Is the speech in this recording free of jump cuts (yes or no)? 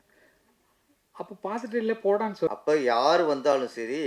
no